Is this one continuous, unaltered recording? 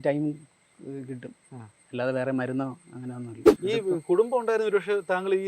no; 1 cut; at 3.4 s

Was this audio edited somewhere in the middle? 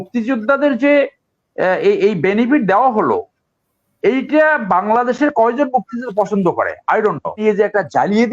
yes; 1 cut; at 7.4 s

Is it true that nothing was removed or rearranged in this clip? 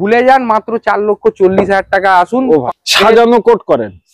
no; 1 cut; at 2.7 s

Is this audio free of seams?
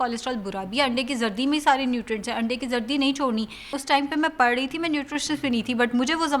no; 1 cut; at 3.8 s

